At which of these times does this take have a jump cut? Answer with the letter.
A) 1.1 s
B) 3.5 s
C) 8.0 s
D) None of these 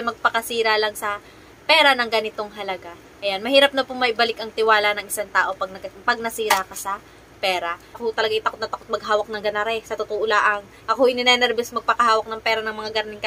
C